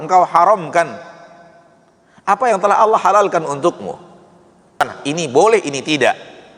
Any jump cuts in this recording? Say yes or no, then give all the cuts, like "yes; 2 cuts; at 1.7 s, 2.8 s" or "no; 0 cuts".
yes; 1 cut; at 4.8 s